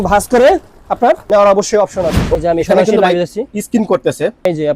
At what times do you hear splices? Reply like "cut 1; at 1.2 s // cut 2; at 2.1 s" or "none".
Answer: cut 1; at 2.3 s